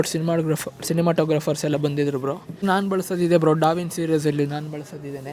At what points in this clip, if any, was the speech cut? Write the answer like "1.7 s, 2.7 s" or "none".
2.6 s